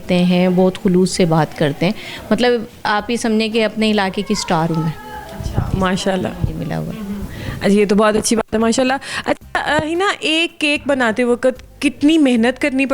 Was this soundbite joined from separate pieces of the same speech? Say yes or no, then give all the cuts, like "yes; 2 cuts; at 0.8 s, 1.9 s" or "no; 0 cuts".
no; 0 cuts